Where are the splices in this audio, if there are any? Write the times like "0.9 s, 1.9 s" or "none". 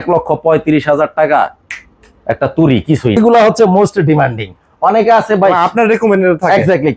3.2 s